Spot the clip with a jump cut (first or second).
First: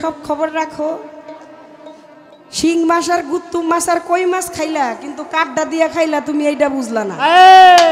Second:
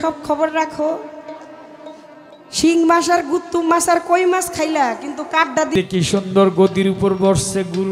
second